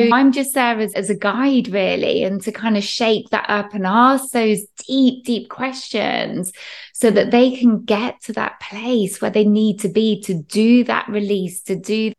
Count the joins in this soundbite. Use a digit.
1